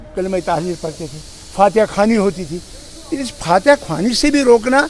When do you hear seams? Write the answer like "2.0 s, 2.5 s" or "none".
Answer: none